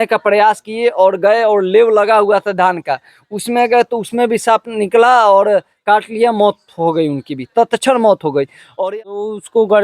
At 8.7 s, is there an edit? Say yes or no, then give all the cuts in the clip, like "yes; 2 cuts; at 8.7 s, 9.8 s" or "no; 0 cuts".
yes; 1 cut; at 8.7 s